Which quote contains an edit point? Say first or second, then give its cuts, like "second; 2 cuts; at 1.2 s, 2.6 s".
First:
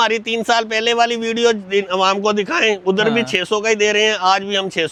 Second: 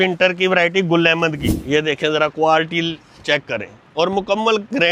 second; 1 cut; at 1.5 s